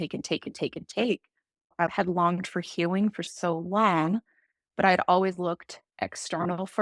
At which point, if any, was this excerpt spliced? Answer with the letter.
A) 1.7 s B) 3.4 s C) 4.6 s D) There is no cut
A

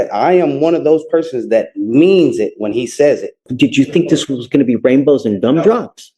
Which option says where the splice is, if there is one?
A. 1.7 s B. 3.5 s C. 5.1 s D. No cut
B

